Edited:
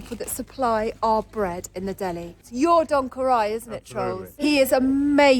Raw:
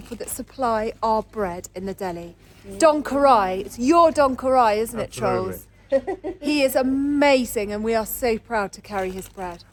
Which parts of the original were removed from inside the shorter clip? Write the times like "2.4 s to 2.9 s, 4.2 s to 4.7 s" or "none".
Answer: 2.4 s to 3.7 s, 5.5 s to 6.3 s